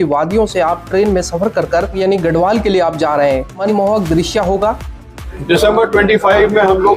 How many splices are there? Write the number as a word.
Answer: three